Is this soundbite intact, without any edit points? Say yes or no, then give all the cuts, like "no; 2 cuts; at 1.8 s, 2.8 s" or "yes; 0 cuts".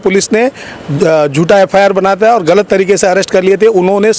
yes; 0 cuts